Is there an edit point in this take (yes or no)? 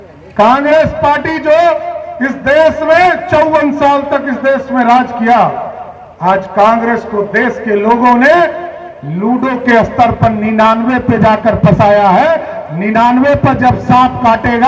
no